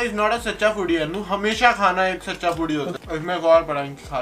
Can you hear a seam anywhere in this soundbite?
no; 0 cuts

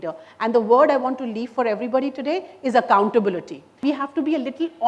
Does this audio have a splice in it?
yes; 1 cut; at 3.8 s

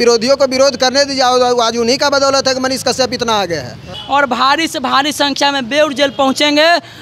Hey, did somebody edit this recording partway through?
yes; 1 cut; at 3.9 s

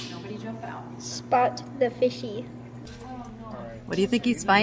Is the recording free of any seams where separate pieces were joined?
no; 1 cut; at 2.8 s

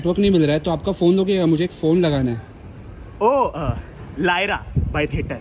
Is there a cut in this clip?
no; 0 cuts

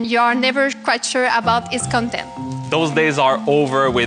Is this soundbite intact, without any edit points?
no; 1 cut; at 2.5 s

